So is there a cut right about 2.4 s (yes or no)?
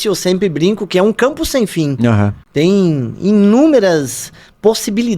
yes